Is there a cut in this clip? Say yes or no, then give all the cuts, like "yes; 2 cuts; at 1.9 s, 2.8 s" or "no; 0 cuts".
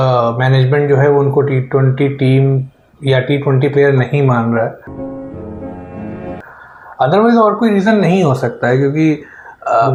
no; 0 cuts